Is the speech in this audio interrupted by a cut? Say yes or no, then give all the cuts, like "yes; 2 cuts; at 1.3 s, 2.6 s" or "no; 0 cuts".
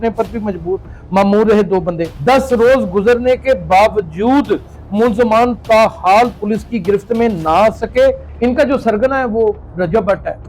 yes; 2 cuts; at 2.1 s, 8.3 s